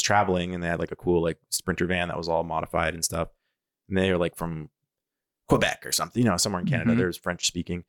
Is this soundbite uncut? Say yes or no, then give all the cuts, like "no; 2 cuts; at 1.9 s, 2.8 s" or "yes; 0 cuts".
yes; 0 cuts